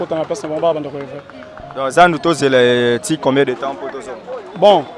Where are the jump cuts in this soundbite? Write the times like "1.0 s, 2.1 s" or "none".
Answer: none